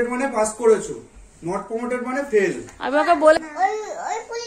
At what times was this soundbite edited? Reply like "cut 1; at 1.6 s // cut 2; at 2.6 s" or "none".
cut 1; at 3.4 s